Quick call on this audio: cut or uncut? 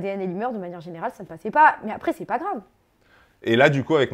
uncut